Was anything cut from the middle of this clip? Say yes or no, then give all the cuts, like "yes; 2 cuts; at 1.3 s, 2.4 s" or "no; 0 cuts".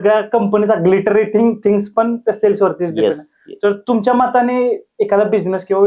no; 0 cuts